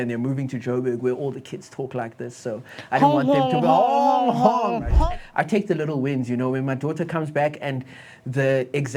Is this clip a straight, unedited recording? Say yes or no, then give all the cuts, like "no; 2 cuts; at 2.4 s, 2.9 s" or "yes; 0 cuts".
no; 1 cut; at 4.9 s